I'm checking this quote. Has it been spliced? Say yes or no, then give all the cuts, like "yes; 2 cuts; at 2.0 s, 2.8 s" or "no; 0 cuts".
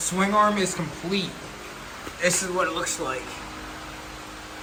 no; 0 cuts